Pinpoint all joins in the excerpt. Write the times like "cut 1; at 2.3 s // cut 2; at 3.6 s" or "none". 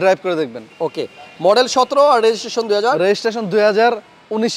none